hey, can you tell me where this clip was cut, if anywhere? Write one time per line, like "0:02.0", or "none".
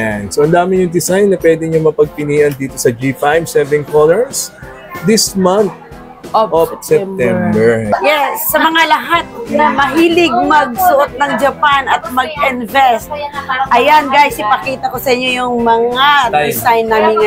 0:07.8